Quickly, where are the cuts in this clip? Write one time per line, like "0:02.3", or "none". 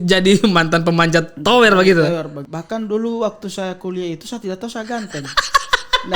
0:02.5